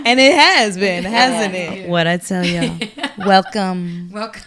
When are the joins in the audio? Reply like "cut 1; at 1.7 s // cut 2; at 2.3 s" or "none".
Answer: cut 1; at 1.8 s